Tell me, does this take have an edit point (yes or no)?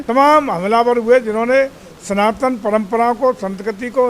no